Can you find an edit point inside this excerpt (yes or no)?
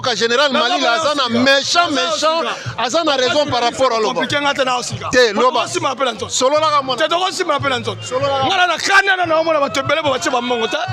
no